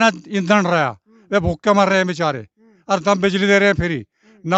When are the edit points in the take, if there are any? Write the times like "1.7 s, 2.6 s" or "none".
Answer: none